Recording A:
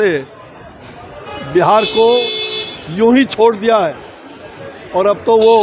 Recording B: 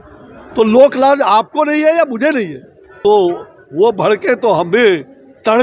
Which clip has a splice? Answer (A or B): B